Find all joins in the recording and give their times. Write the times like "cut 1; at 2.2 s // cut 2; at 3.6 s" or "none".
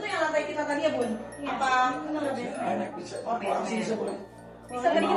none